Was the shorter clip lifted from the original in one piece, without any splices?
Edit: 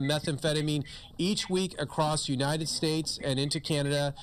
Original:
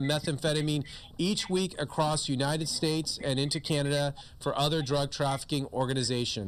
yes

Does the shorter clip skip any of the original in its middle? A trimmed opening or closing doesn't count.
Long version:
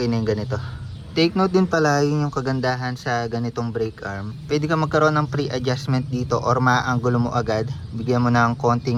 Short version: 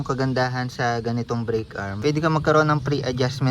yes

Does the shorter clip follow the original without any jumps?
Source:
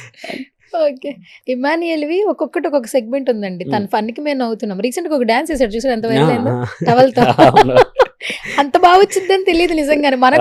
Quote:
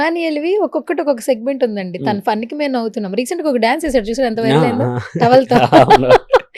yes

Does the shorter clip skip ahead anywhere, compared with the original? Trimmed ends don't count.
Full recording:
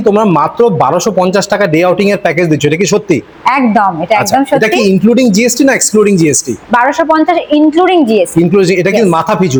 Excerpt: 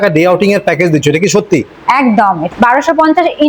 yes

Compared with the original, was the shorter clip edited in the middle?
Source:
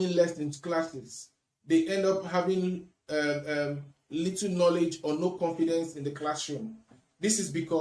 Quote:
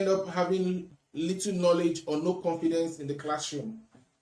yes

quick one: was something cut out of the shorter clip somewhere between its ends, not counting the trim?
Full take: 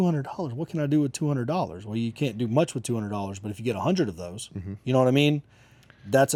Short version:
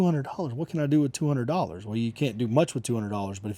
no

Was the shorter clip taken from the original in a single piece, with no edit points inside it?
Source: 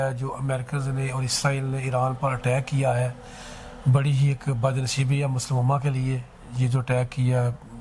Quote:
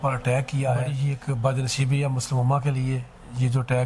no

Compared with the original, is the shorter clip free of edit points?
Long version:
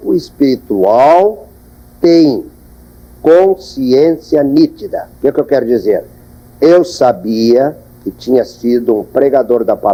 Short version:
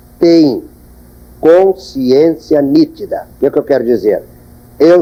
yes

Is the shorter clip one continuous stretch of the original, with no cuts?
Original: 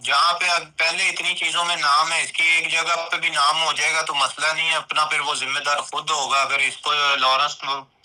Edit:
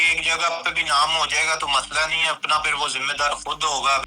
yes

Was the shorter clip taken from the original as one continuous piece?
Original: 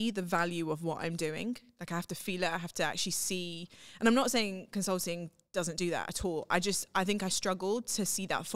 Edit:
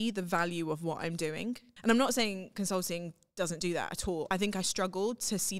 no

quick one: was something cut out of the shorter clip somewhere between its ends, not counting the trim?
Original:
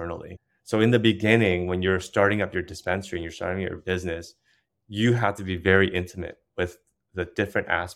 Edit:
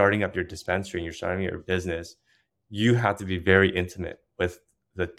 no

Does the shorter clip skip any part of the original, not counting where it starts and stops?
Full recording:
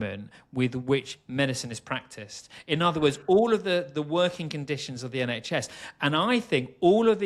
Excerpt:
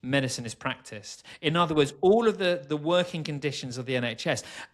no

